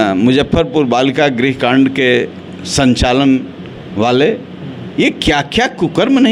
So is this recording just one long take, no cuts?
yes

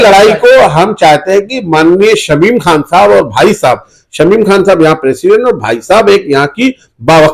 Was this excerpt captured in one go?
yes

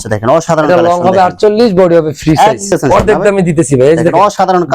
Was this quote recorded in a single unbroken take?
no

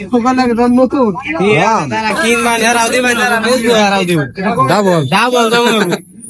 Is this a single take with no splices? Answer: yes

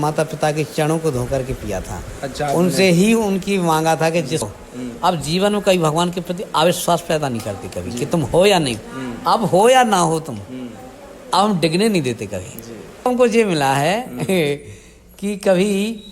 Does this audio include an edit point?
yes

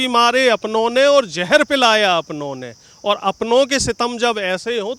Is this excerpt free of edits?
yes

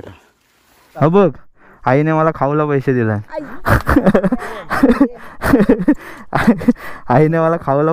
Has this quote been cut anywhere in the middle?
yes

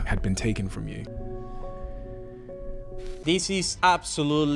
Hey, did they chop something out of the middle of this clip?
yes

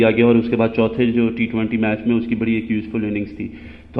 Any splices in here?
no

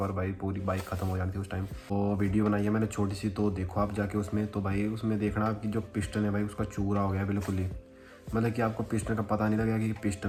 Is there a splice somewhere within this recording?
no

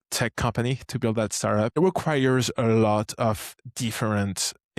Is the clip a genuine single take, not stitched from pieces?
no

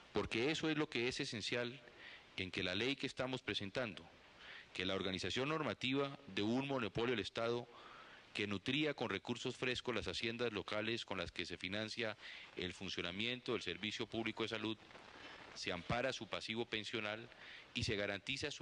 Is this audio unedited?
yes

